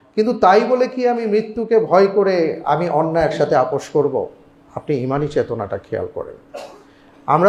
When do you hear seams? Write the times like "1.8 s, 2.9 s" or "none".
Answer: none